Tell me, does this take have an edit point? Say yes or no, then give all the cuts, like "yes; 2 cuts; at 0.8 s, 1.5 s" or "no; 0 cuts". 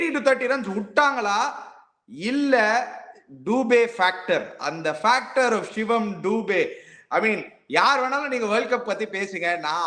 no; 0 cuts